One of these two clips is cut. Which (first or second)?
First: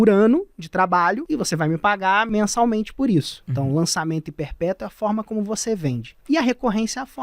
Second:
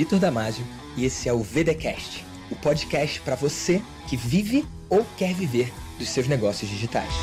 first